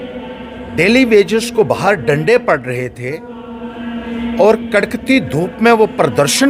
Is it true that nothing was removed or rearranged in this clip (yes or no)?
yes